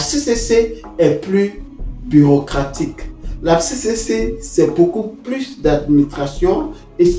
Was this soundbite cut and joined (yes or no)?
no